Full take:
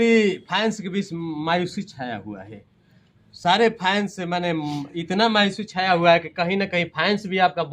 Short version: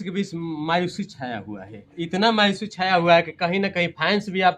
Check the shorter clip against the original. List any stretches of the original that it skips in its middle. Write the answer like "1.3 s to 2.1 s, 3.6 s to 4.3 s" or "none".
2.7 s to 4.9 s